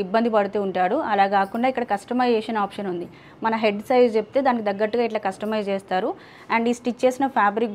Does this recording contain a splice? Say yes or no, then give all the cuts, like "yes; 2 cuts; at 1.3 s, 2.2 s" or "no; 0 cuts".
no; 0 cuts